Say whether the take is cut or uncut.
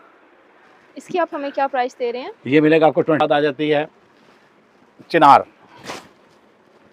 cut